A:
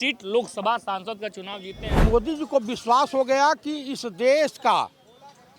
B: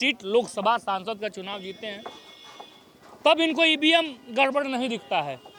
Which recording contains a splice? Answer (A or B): A